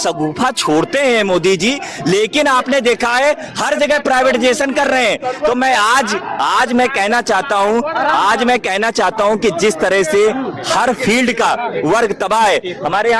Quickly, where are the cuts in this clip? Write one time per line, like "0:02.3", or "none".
none